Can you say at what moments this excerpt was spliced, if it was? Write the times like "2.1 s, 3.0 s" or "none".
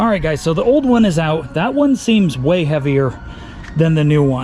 none